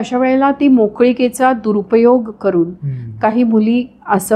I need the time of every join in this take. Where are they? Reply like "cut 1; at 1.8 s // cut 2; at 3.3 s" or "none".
none